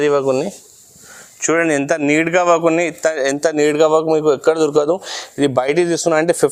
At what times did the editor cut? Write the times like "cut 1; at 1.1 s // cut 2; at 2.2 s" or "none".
none